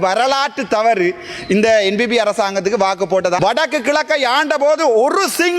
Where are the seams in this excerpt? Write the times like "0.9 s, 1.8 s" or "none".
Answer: 3.4 s